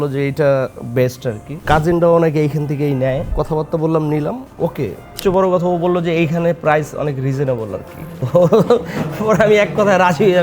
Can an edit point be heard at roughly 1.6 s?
yes; 4 cuts; at 1.6 s, 3.3 s, 5.2 s, 8.2 s

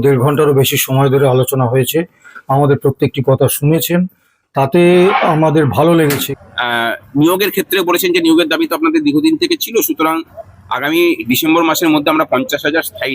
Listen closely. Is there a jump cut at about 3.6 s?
no; 1 cut; at 6.2 s

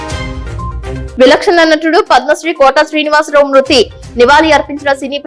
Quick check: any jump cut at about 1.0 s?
yes; 1 cut; at 1.0 s

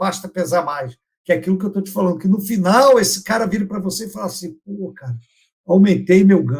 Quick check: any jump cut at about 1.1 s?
yes; 1 cut; at 1.1 s

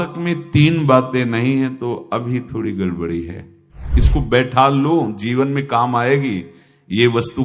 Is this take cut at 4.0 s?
yes; 1 cut; at 4.0 s

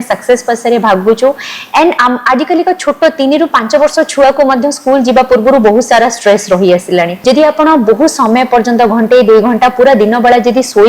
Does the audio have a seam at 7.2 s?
yes; 1 cut; at 7.2 s

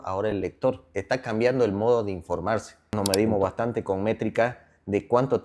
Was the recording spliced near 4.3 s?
no; 2 cuts; at 0.9 s, 2.9 s

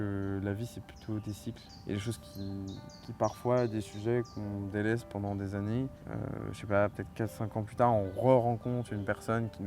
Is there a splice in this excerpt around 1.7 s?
yes; 2 cuts; at 1.7 s, 6.0 s

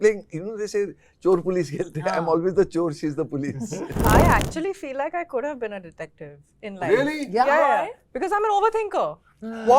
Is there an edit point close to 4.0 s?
yes; 1 cut; at 4.0 s

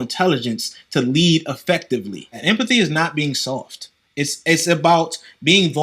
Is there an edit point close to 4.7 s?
no; 1 cut; at 2.4 s

